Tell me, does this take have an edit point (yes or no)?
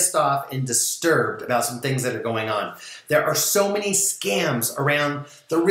yes